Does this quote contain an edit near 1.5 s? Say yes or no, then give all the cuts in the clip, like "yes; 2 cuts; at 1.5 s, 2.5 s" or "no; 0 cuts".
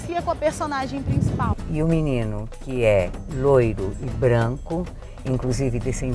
yes; 1 cut; at 1.5 s